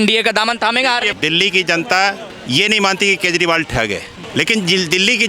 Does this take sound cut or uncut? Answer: cut